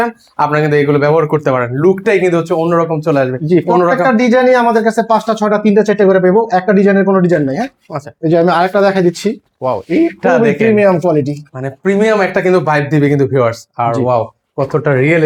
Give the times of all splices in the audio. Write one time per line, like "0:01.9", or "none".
none